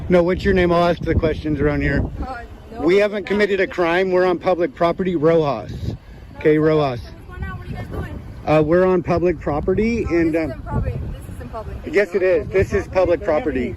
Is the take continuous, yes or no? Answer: yes